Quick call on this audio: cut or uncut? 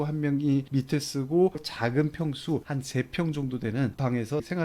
uncut